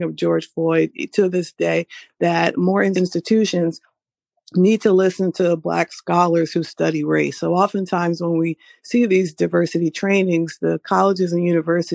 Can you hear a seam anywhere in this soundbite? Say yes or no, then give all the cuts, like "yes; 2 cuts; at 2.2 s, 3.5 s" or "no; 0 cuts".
yes; 1 cut; at 2.9 s